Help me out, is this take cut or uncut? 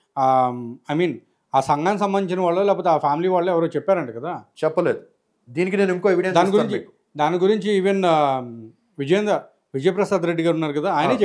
uncut